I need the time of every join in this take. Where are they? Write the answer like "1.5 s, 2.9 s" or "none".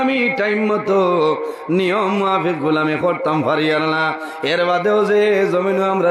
none